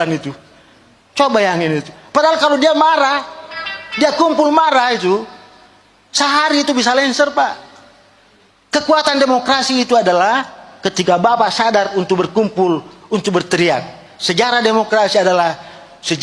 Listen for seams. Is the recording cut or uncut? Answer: uncut